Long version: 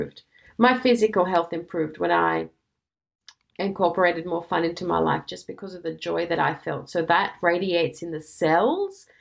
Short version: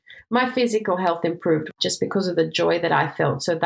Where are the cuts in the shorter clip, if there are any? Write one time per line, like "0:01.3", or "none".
0:01.7